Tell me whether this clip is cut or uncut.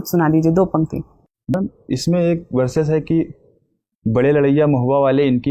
cut